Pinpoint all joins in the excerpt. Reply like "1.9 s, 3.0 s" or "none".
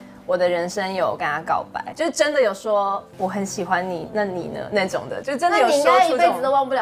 1.9 s, 3.1 s